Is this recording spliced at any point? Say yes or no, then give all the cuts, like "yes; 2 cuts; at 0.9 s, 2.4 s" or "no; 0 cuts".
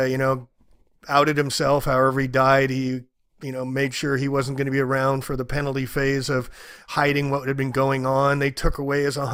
no; 0 cuts